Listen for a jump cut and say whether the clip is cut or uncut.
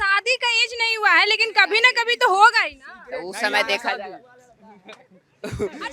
uncut